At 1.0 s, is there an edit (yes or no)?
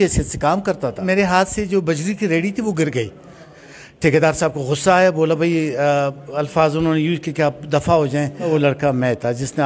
yes